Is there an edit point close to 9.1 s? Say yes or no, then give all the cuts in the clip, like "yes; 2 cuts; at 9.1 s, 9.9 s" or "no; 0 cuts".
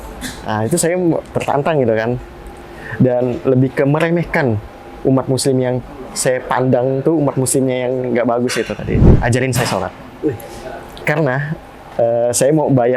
yes; 1 cut; at 9.1 s